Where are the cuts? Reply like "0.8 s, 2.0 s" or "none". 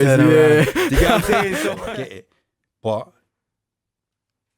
1.8 s